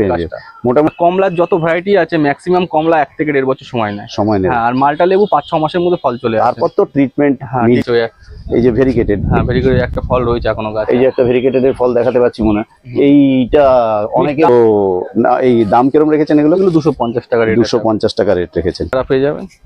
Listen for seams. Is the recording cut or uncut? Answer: cut